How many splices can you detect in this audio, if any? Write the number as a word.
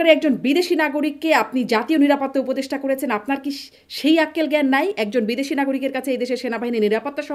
zero